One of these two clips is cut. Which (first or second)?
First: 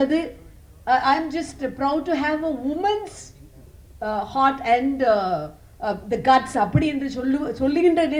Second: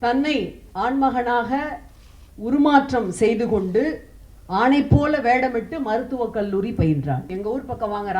second